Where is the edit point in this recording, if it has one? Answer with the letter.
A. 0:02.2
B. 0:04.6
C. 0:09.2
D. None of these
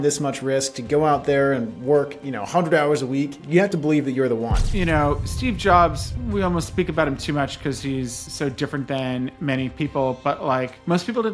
B